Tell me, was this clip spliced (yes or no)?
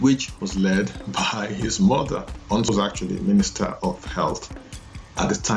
yes